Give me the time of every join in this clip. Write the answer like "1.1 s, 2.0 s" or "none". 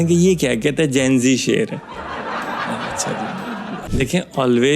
3.8 s